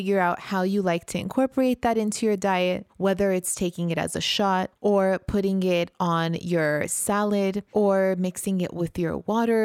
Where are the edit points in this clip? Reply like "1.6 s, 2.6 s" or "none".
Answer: 4.7 s, 7.6 s